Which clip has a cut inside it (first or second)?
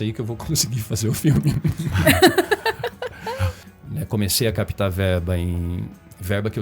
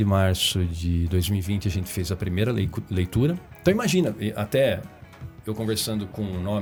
first